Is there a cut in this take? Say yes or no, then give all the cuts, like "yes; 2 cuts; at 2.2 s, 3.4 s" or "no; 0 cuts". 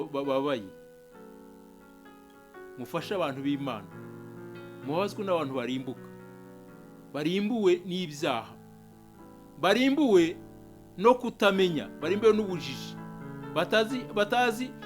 yes; 2 cuts; at 0.7 s, 2.4 s